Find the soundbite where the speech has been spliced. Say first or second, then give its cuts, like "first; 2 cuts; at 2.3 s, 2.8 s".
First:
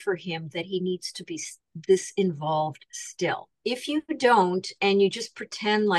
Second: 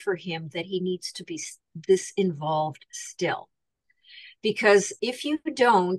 first; 1 cut; at 3.6 s